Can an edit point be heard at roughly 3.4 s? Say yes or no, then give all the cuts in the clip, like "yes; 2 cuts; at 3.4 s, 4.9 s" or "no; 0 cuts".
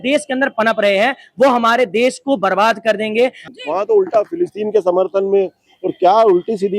yes; 1 cut; at 3.4 s